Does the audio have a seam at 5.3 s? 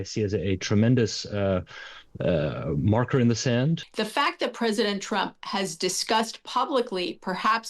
no; 1 cut; at 3.9 s

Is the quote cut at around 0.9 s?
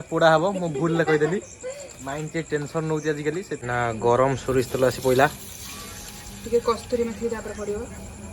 no; 1 cut; at 3.6 s

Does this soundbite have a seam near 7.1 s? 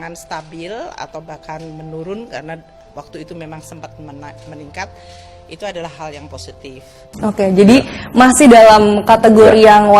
yes; 1 cut; at 7.1 s

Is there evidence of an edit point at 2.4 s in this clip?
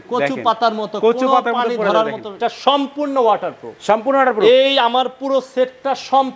yes; 1 cut; at 2.4 s

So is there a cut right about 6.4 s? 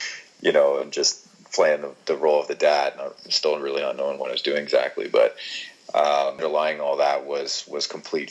yes; 1 cut; at 6.4 s

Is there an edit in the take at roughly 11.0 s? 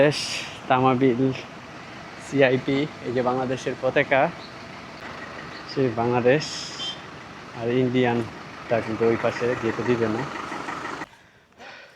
yes; 2 cuts; at 5.0 s, 11.0 s

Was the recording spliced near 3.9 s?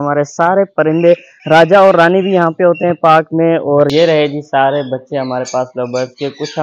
yes; 1 cut; at 3.9 s

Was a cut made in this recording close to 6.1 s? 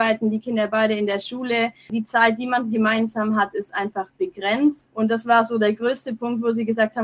no; 2 cuts; at 1.9 s, 4.8 s

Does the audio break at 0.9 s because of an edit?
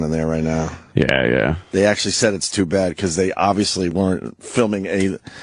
yes; 1 cut; at 0.9 s

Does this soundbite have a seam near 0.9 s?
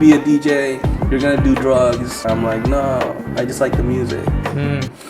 no; 1 cut; at 2.2 s

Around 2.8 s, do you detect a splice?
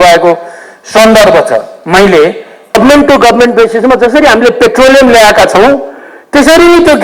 yes; 1 cut; at 2.8 s

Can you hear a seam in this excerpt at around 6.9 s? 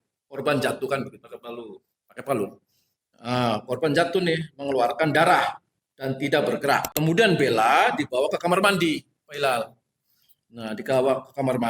yes; 1 cut; at 6.9 s

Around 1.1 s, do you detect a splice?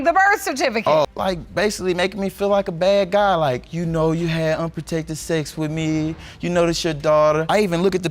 yes; 1 cut; at 1.1 s

